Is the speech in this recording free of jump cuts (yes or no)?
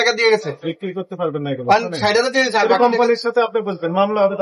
yes